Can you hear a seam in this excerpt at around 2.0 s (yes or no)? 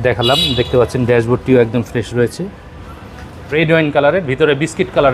no